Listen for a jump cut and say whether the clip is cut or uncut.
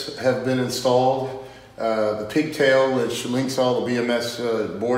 uncut